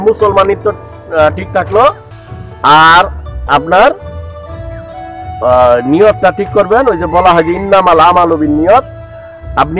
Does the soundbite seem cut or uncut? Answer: cut